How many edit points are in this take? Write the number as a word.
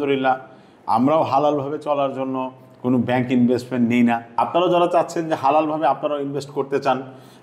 zero